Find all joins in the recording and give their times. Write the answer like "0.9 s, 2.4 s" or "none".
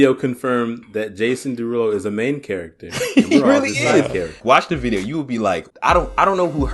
4.4 s, 5.7 s